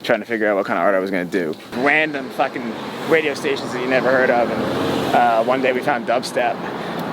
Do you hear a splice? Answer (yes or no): yes